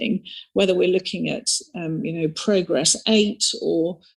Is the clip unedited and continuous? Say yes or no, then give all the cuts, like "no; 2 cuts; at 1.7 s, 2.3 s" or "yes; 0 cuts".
yes; 0 cuts